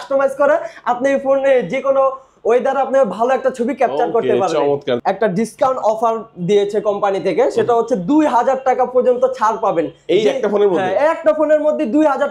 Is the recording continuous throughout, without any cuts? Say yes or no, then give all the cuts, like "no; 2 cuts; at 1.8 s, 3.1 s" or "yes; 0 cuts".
no; 1 cut; at 5.0 s